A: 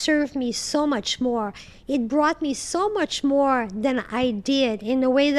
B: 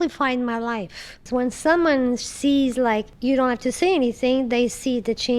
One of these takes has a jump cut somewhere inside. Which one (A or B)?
B